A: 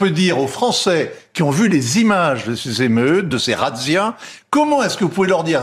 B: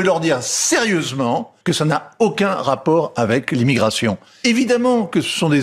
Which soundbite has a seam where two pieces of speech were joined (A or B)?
B